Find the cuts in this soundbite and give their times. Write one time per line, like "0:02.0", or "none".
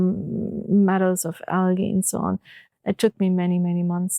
0:02.6

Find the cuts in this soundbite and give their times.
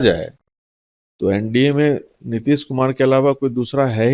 none

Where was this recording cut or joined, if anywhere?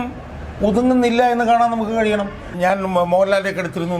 0:02.6

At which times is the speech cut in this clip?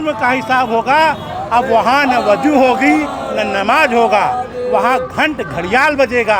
none

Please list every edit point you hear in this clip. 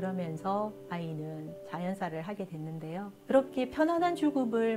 0:03.2

